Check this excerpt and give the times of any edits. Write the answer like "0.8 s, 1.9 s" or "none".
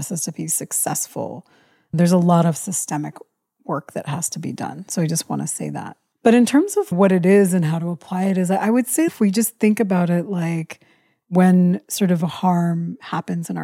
6.9 s, 9.1 s